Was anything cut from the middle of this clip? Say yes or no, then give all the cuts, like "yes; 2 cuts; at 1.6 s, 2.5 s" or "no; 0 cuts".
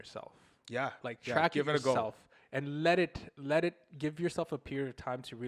no; 0 cuts